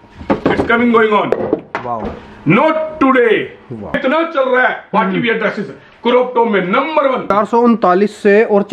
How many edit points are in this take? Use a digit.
3